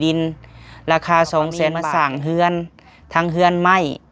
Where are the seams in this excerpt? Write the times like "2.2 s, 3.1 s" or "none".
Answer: 1.8 s